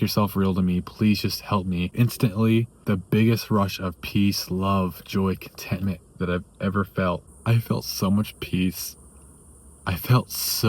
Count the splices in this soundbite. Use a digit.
3